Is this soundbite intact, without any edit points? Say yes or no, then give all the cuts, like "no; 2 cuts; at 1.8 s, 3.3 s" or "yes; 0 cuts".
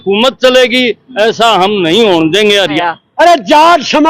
no; 1 cut; at 2.8 s